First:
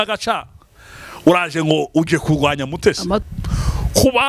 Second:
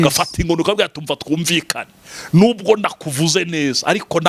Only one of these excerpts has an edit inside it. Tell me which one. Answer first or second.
first